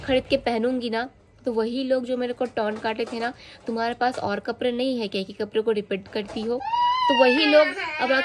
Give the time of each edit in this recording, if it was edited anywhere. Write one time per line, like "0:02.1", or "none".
none